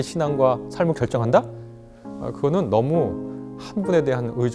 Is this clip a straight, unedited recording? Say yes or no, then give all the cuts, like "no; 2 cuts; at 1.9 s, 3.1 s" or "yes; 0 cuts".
yes; 0 cuts